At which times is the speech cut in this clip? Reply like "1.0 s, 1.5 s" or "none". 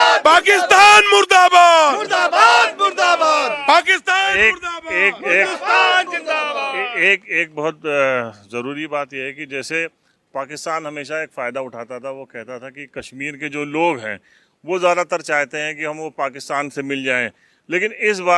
none